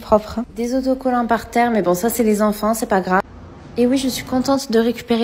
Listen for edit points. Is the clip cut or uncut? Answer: uncut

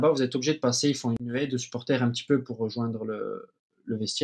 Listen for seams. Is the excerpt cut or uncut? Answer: cut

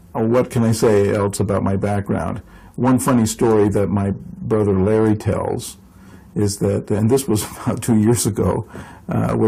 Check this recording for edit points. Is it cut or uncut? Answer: uncut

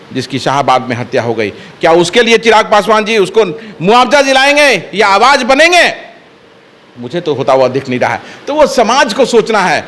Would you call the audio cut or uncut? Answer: uncut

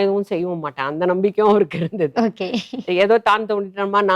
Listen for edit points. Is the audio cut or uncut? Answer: uncut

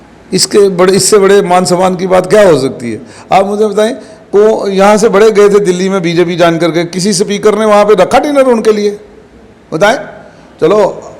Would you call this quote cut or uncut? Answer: uncut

